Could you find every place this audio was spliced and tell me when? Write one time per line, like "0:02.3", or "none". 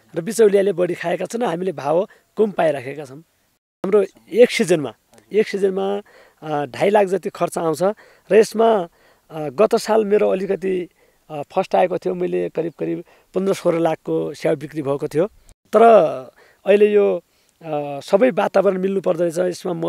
0:03.9
0:15.5